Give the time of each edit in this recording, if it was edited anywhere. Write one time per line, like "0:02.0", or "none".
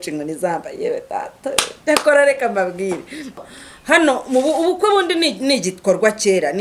0:03.4